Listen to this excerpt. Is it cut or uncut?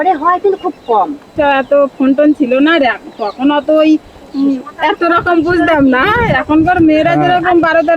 cut